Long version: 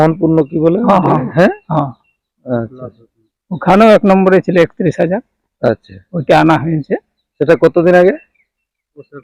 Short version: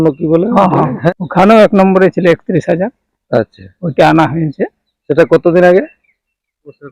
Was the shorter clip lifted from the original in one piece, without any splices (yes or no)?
no